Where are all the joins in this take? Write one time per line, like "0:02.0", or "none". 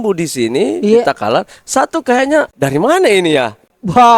0:02.5